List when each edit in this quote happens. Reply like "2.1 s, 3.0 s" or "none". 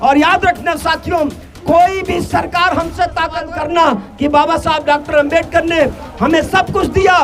3.3 s